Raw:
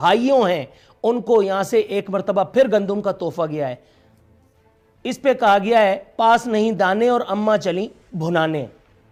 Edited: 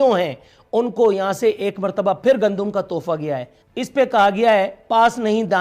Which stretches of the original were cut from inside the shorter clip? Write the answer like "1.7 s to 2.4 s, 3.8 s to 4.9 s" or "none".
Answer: 3.9 s to 4.9 s